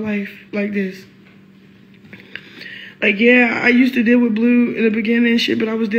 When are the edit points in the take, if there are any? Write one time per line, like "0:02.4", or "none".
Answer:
none